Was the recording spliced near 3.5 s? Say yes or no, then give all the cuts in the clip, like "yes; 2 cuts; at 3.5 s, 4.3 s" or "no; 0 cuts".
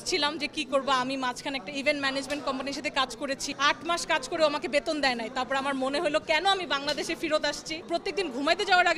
yes; 2 cuts; at 3.5 s, 7.9 s